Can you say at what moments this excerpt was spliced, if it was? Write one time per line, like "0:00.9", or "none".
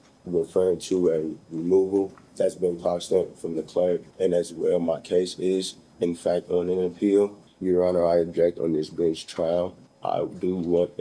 0:02.2
0:04.1
0:07.5
0:09.9